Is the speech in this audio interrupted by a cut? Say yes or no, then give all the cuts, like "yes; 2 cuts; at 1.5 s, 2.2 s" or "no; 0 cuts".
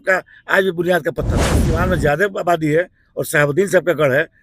yes; 1 cut; at 1.6 s